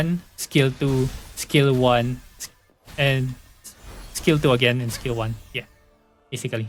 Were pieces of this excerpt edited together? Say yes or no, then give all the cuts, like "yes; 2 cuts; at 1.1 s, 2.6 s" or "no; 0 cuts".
no; 0 cuts